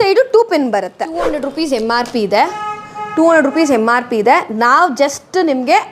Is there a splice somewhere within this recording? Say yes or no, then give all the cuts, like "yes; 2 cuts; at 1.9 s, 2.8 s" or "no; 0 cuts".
yes; 1 cut; at 1.3 s